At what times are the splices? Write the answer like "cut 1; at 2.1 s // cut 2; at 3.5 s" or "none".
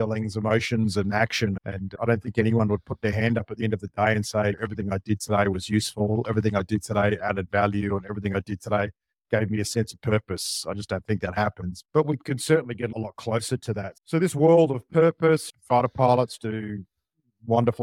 none